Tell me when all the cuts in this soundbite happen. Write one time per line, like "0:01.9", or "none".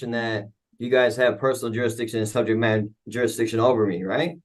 none

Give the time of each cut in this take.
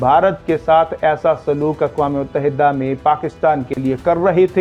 none

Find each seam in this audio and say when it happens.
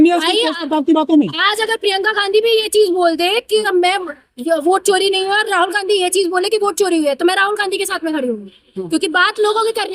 none

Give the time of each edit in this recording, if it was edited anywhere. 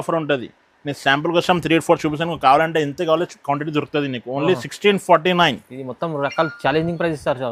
none

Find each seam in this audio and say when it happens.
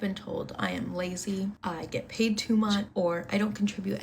0:01.6
0:02.9

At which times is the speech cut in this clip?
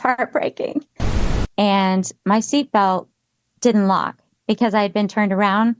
0:01.1

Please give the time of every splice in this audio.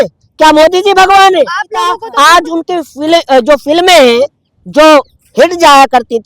0:02.1

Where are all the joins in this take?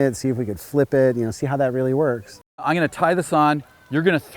0:02.6

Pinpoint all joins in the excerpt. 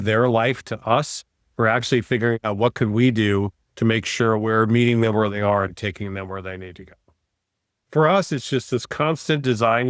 0:07.7

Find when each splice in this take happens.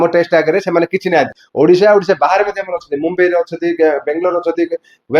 0:01.4

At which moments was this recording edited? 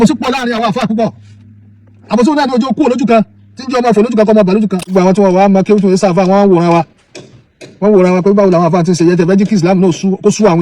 0:04.8

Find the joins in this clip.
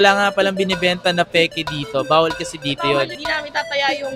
none

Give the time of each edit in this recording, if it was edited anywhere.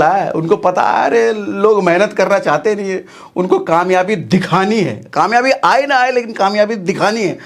none

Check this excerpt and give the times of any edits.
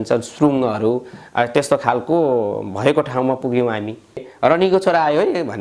0:04.3

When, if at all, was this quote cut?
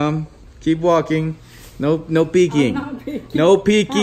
none

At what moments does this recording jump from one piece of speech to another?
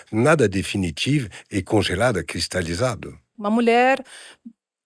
0:03.3

